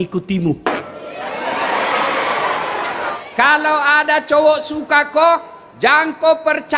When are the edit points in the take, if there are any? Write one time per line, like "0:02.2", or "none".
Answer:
0:03.0